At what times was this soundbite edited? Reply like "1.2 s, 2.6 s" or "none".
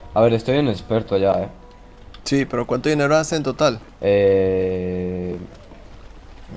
none